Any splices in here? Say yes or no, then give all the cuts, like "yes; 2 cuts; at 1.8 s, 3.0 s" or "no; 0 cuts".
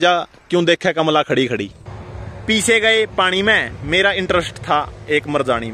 yes; 1 cut; at 1.8 s